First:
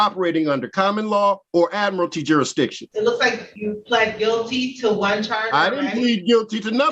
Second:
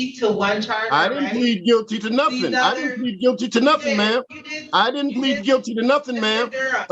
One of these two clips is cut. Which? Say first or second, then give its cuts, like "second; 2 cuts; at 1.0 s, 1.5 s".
first; 3 cuts; at 1.4 s, 2.8 s, 3.5 s